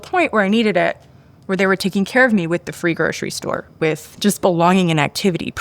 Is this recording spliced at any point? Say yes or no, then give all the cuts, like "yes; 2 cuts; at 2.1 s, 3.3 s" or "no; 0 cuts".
yes; 1 cut; at 4.1 s